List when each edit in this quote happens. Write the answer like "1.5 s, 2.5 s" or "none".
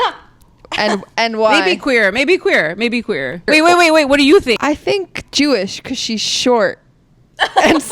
3.5 s, 4.6 s